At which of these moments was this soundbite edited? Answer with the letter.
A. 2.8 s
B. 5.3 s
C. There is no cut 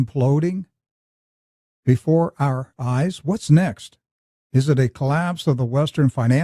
C